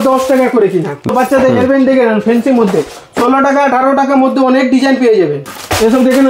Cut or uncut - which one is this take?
cut